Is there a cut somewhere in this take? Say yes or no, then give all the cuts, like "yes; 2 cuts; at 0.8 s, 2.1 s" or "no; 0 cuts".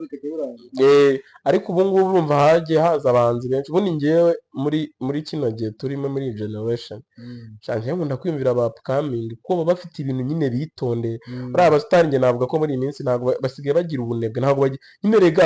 no; 0 cuts